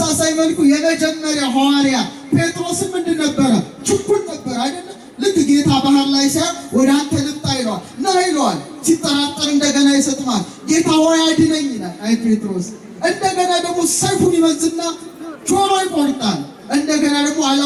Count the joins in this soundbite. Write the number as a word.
zero